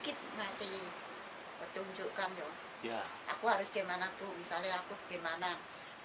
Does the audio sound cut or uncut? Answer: uncut